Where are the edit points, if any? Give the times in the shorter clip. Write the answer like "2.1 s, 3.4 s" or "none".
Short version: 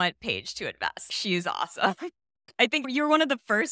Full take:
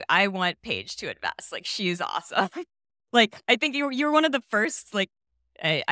1.1 s, 2.6 s